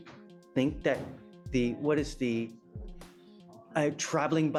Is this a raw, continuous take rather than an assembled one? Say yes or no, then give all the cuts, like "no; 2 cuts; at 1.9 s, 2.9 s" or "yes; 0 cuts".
yes; 0 cuts